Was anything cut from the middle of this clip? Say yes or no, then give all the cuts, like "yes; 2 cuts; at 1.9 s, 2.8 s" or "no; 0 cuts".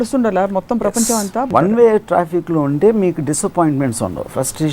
yes; 1 cut; at 1.5 s